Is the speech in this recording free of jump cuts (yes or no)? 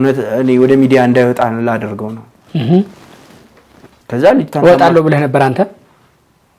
yes